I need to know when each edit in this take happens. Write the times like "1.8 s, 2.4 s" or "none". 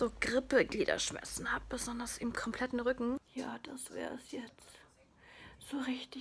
3.3 s